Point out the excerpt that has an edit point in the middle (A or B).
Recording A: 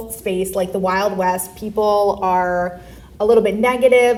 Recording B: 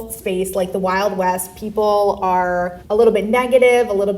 B